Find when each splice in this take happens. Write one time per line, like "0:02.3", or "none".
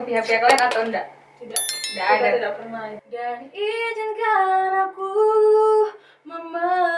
0:03.0